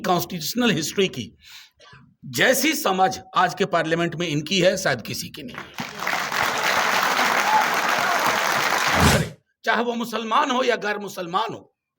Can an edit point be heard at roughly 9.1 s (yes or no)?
yes